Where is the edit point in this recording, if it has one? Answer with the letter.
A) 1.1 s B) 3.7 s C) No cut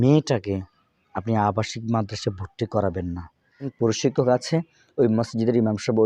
B